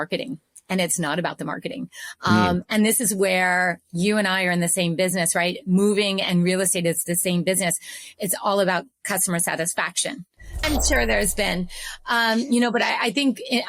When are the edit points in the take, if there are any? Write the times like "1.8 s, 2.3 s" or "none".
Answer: 10.5 s